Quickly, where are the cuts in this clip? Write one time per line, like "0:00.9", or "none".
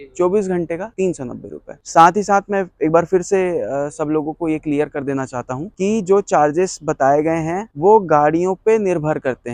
none

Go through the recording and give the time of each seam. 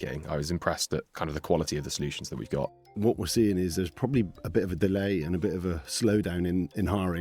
0:01.1
0:02.9

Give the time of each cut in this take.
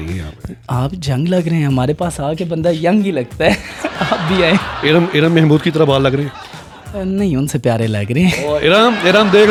none

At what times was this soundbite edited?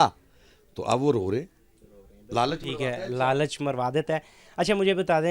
none

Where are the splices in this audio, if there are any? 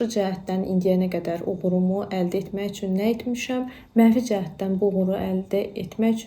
none

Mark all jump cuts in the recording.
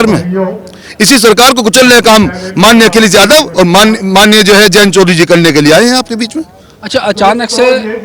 none

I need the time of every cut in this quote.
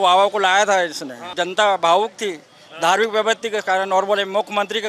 0:01.3

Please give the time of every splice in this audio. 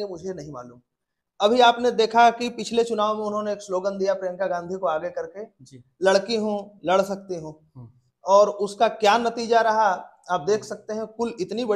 none

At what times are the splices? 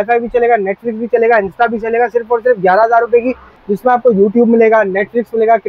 0:03.5

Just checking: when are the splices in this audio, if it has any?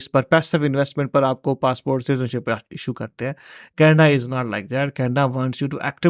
none

